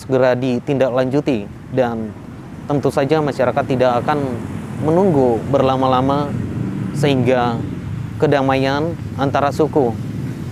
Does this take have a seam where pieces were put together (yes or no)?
no